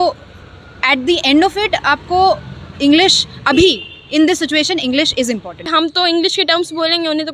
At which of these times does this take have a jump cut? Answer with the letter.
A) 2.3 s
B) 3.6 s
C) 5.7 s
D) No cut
C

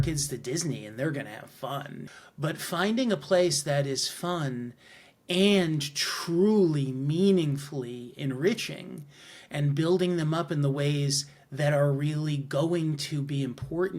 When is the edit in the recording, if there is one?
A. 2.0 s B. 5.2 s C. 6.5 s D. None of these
A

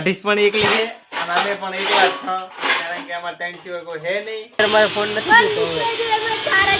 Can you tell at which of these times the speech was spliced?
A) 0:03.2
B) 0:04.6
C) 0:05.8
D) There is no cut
B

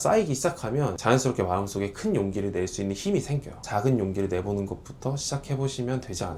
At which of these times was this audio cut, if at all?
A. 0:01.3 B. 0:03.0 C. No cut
C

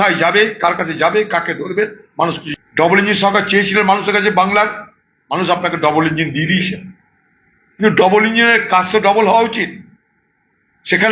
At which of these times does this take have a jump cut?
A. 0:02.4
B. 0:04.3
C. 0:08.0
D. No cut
A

